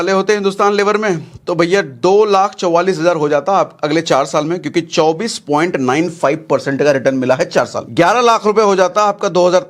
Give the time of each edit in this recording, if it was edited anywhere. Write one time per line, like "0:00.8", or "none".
0:07.8

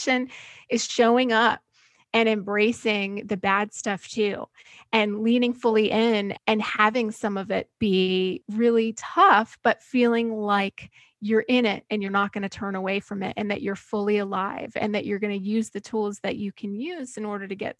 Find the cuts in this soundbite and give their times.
0:06.3
0:08.4

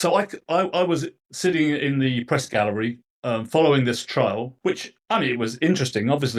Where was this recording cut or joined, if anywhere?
none

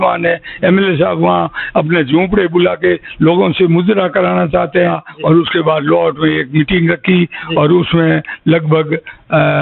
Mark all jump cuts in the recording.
0:05.0

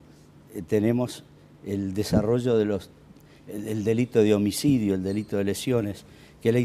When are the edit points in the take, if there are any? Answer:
0:05.6

